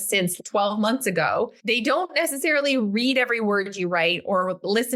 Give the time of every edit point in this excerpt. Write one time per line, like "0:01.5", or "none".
0:01.6